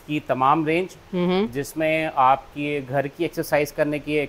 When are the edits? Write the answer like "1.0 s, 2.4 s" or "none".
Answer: none